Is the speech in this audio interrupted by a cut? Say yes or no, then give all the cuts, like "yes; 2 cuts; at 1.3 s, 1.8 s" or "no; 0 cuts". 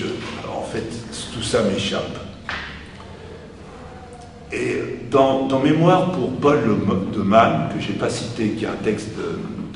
no; 0 cuts